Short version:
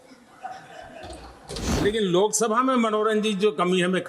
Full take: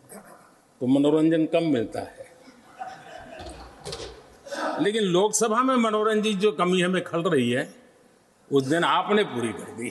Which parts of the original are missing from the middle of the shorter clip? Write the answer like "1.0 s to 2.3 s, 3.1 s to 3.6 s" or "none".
4.1 s to 4.8 s